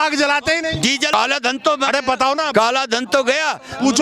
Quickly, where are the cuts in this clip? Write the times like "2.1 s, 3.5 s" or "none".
1.1 s

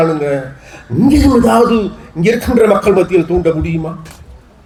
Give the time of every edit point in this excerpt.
none

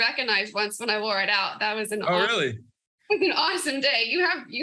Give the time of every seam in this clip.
none

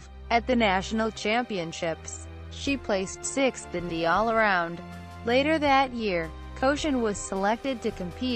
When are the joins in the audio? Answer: 2.5 s

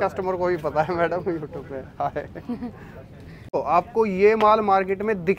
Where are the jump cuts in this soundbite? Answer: 3.5 s

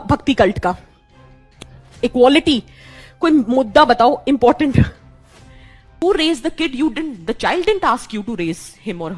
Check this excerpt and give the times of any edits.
6.0 s

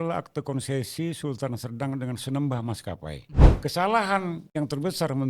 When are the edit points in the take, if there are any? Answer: 3.6 s, 4.4 s

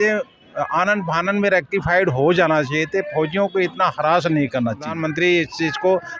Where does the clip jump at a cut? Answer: 5.0 s

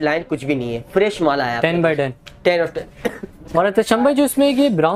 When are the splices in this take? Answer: none

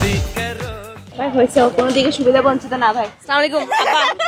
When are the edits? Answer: none

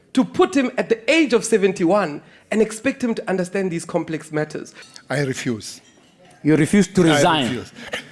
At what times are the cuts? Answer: 4.8 s

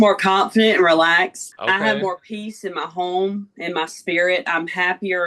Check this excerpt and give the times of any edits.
1.5 s

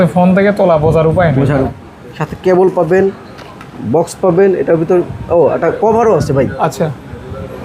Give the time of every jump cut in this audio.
1.7 s

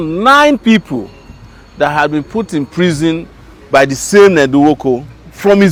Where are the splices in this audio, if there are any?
none

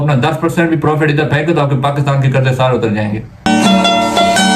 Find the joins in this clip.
none

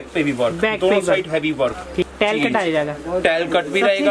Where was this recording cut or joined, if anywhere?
2.1 s

